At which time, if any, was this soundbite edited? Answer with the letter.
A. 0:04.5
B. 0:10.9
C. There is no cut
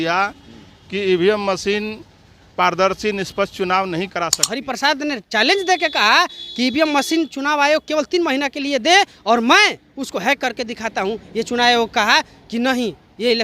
A